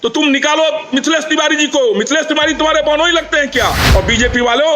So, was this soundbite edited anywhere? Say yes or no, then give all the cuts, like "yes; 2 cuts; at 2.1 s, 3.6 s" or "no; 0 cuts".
yes; 1 cut; at 3.8 s